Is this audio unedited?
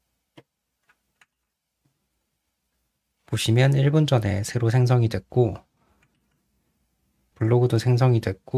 yes; 0 cuts

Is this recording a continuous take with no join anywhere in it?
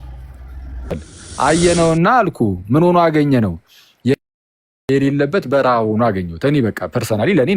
no; 1 cut; at 1.1 s

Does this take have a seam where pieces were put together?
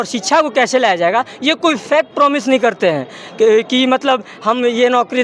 no; 0 cuts

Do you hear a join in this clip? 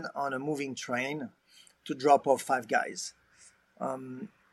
no; 0 cuts

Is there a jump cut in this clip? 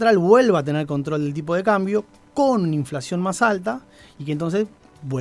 no; 0 cuts

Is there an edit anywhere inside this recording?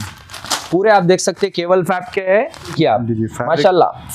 yes; 1 cut; at 2.8 s

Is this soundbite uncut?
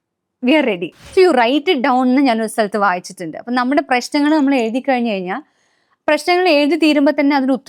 no; 1 cut; at 0.9 s

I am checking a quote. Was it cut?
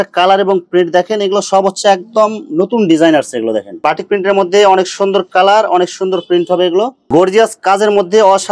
yes; 2 cuts; at 3.7 s, 7.0 s

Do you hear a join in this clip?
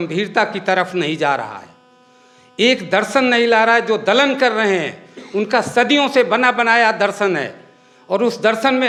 no; 0 cuts

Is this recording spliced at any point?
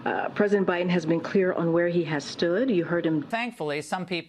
yes; 1 cut; at 3.3 s

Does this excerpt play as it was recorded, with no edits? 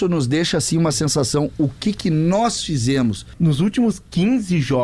no; 1 cut; at 3.2 s

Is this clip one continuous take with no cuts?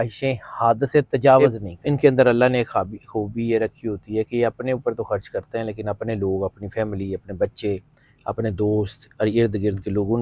no; 1 cut; at 1.4 s

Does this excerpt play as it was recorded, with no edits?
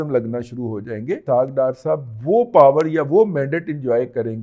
no; 1 cut; at 1.2 s

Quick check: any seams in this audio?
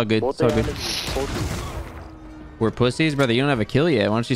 no; 0 cuts

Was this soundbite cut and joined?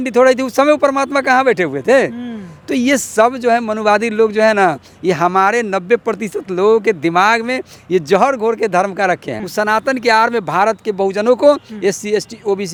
no; 0 cuts

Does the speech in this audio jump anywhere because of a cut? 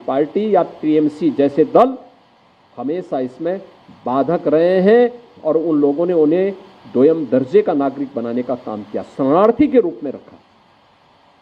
no; 0 cuts

